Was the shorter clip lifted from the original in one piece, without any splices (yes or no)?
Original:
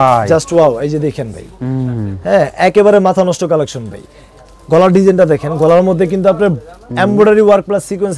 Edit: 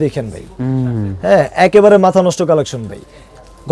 yes